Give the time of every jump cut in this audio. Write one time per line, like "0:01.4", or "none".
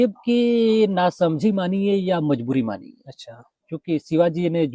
none